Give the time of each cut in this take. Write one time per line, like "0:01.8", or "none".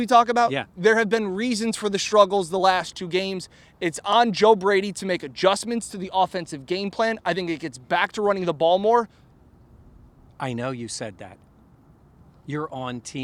none